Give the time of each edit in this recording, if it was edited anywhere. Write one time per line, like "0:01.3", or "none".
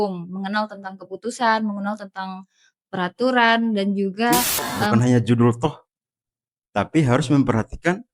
0:04.9